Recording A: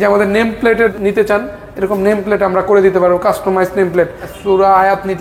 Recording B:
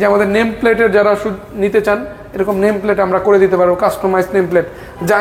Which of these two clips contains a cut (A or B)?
A